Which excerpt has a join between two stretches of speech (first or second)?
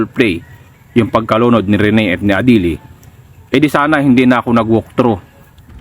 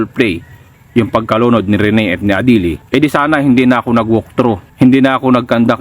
second